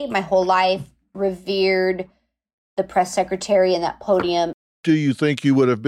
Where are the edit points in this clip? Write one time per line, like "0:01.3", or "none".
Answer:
0:04.5